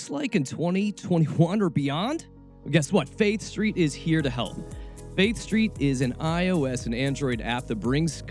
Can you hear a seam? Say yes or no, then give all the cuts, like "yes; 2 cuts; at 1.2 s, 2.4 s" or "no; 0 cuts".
no; 0 cuts